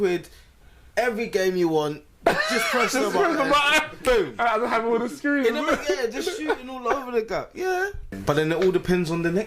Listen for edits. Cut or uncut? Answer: cut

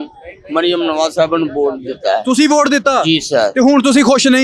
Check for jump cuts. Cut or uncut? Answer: uncut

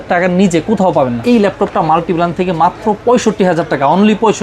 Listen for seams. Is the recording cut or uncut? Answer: cut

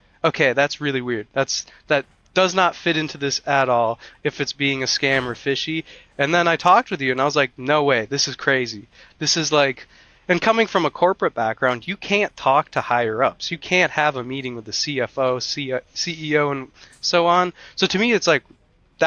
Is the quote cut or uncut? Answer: uncut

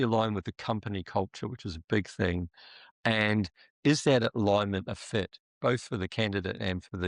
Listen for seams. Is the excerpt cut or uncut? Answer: uncut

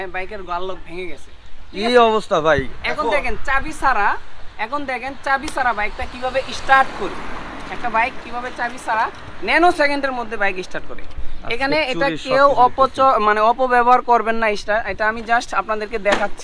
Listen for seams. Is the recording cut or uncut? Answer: uncut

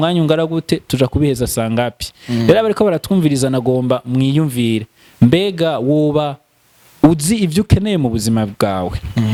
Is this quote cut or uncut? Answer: uncut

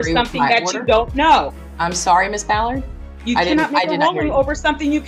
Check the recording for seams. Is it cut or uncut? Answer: uncut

